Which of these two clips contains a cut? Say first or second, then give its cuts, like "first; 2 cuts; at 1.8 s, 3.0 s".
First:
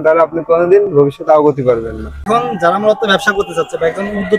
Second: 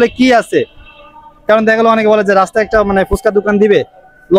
first; 1 cut; at 2.3 s